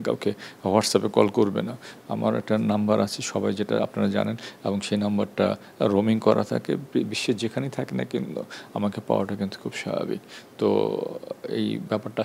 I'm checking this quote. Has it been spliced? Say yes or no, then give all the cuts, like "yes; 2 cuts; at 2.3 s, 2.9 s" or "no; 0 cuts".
no; 0 cuts